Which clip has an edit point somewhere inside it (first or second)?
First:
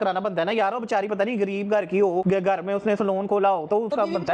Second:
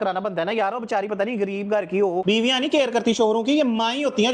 second